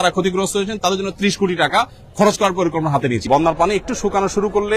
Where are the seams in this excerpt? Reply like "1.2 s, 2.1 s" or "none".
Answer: 3.2 s